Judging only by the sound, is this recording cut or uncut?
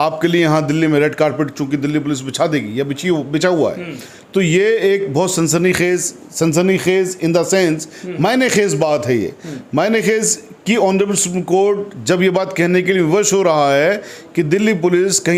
uncut